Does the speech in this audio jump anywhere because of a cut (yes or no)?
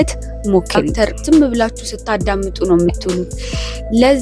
yes